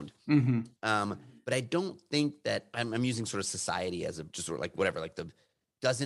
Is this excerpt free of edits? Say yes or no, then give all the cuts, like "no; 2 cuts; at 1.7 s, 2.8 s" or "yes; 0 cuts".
no; 3 cuts; at 1.3 s, 2.7 s, 4.3 s